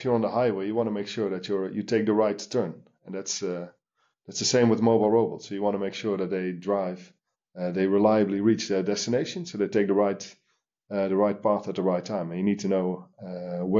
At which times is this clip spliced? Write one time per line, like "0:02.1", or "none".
none